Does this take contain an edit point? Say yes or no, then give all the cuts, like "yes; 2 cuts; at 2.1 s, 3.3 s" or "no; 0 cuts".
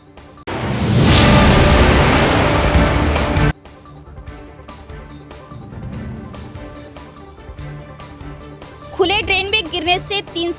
no; 0 cuts